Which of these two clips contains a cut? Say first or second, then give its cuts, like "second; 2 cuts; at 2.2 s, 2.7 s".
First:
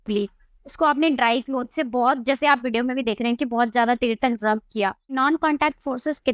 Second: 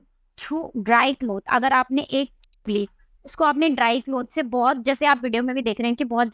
first; 1 cut; at 5.2 s